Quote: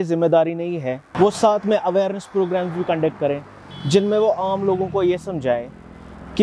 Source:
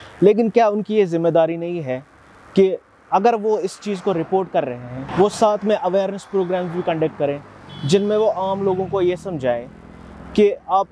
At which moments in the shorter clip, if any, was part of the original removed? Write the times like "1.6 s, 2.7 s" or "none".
1.0 s